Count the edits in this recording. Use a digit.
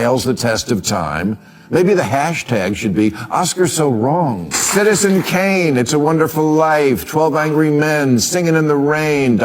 1